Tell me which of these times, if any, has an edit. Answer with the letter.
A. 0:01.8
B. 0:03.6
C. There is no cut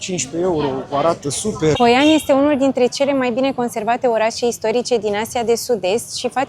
A